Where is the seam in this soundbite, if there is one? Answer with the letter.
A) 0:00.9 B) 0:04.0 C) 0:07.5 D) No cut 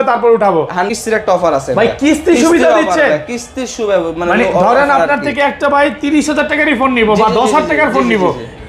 A